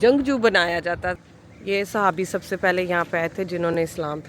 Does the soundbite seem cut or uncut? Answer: cut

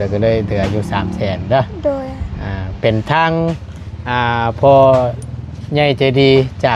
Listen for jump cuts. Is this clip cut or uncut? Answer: uncut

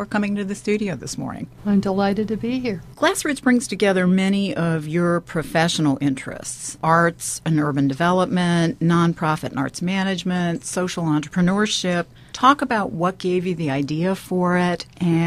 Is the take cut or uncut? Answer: cut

